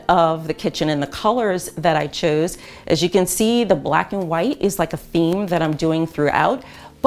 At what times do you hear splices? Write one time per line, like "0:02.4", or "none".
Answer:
none